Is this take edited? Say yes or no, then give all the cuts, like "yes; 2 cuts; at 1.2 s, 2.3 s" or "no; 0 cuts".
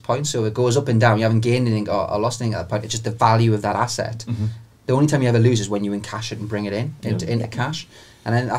no; 0 cuts